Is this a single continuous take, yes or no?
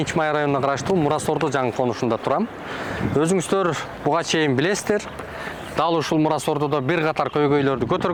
yes